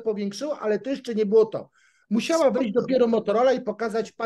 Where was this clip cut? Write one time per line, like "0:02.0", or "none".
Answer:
none